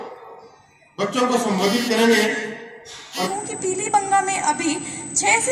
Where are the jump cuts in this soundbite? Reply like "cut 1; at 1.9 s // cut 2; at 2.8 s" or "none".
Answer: cut 1; at 3.3 s